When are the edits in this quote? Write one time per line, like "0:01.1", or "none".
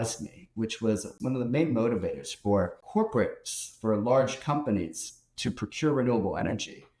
0:01.1
0:02.8